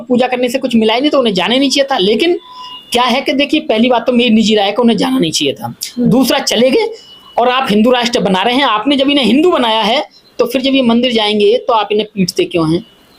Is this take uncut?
yes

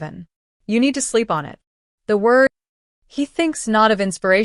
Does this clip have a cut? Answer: yes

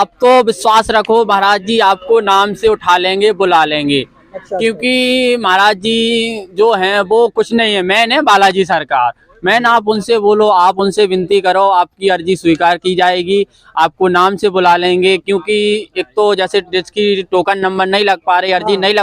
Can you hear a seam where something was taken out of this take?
no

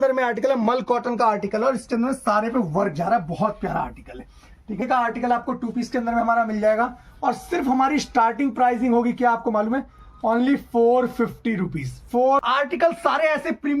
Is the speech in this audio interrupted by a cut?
yes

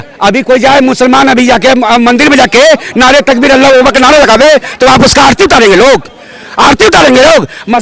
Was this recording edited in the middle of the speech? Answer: no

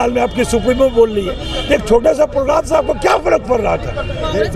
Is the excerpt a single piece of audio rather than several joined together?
yes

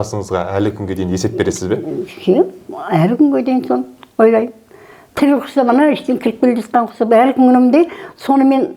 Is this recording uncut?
yes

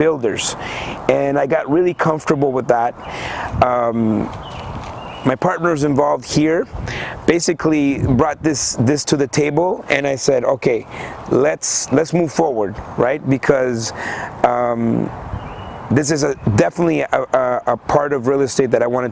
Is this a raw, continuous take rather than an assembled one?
yes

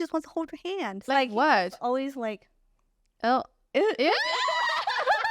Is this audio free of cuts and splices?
no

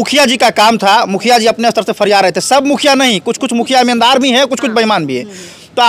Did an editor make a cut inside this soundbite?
no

